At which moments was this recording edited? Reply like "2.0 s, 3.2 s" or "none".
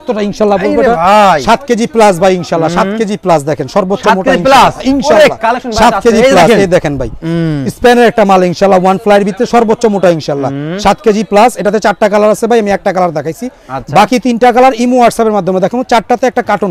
none